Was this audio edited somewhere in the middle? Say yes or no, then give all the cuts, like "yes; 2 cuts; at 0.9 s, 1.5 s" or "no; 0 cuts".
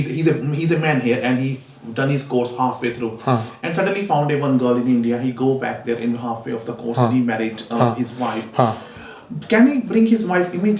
no; 0 cuts